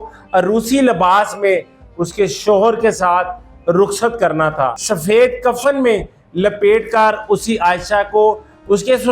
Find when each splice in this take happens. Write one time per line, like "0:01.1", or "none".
0:04.8